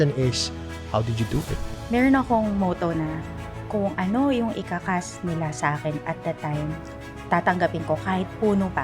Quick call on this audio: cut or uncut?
cut